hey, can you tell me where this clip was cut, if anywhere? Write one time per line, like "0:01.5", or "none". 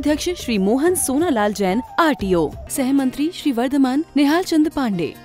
none